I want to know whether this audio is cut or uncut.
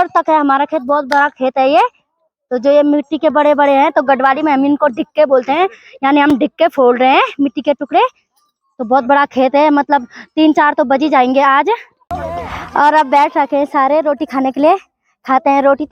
cut